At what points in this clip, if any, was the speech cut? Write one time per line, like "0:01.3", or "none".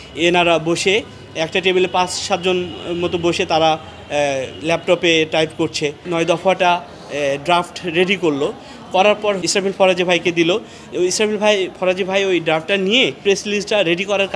0:06.0
0:09.4
0:13.2

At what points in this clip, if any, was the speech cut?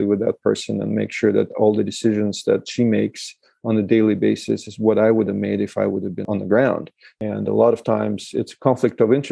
0:06.3
0:07.2

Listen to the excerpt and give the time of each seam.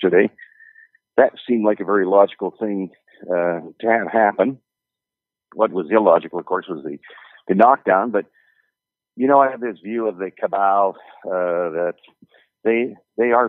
0:08.7

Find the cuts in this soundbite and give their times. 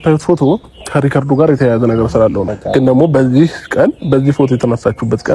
0:02.4

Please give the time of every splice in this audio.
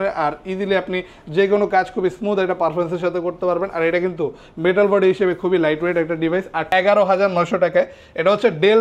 0:06.7

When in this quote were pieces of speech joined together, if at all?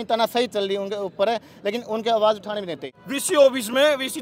0:02.8

